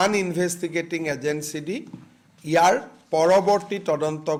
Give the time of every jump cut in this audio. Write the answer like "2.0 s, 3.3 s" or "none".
none

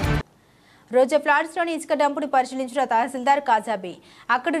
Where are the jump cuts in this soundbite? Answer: none

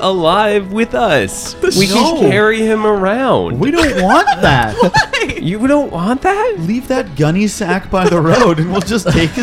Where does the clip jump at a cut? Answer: 6.6 s

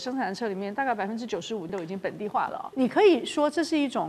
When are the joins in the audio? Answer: 1.7 s, 2.7 s

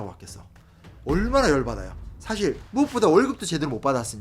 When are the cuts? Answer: 2.6 s

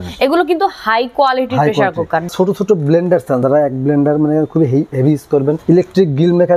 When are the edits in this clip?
2.3 s, 3.4 s, 5.6 s

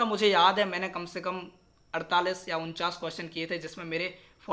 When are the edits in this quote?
none

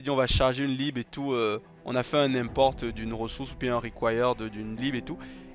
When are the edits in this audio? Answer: none

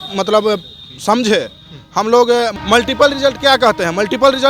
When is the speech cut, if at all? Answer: none

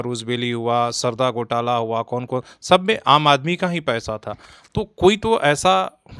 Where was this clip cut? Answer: none

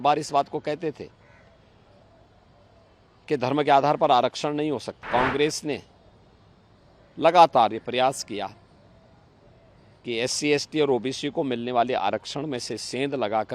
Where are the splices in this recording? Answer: 5.0 s

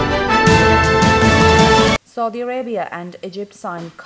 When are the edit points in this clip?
2.0 s

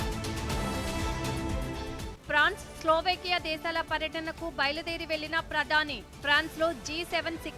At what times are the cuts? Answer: 1.6 s

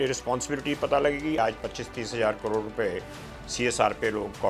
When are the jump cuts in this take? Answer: 1.4 s

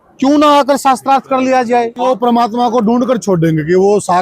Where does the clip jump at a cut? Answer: 2.0 s

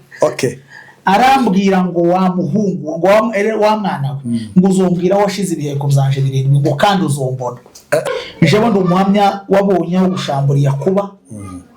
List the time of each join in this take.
8.1 s

